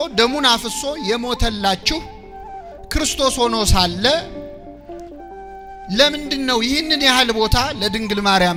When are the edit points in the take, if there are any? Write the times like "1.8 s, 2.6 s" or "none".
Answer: none